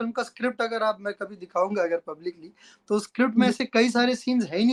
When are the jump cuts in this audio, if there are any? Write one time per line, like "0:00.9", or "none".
none